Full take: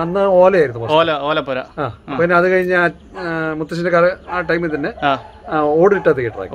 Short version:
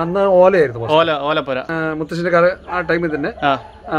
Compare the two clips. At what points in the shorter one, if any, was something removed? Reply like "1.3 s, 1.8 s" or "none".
1.7 s